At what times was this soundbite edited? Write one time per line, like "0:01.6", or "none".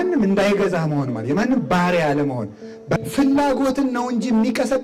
0:03.0